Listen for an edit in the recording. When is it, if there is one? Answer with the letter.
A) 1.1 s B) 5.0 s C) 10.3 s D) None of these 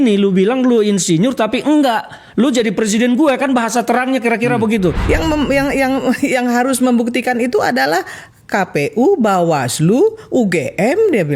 B